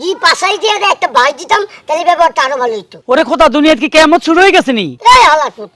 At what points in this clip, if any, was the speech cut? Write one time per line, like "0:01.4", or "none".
0:02.9
0:04.9